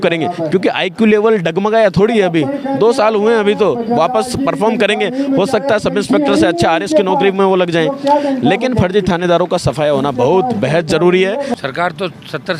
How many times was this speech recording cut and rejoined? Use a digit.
1